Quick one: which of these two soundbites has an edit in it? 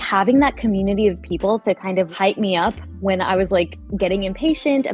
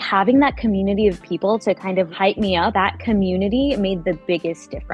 second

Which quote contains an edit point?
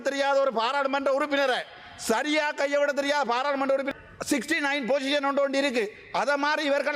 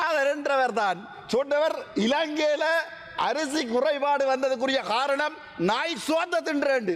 first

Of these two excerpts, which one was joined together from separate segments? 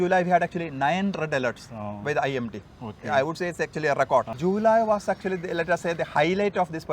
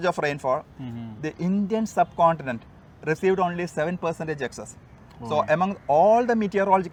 first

